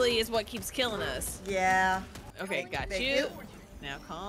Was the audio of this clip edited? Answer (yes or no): yes